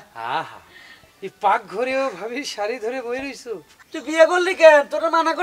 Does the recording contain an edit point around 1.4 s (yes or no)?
no